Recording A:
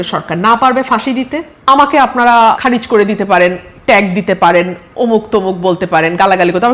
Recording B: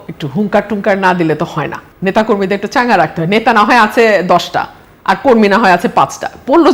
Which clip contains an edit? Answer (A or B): A